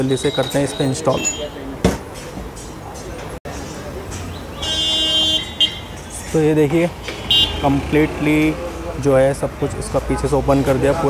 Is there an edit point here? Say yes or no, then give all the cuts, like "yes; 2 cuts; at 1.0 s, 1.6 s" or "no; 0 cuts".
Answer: no; 0 cuts